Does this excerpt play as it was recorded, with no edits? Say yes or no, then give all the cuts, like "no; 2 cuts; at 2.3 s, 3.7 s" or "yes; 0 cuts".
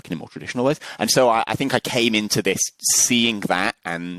yes; 0 cuts